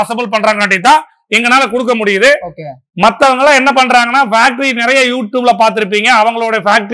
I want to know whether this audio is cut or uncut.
uncut